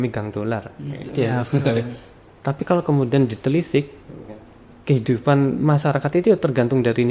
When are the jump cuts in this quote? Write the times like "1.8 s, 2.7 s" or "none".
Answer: none